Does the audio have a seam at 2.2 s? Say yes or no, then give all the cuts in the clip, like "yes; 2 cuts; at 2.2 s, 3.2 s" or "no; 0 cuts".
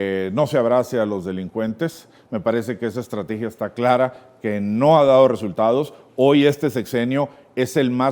no; 0 cuts